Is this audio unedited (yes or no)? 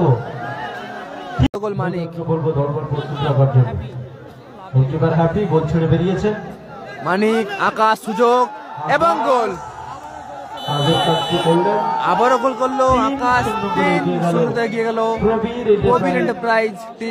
no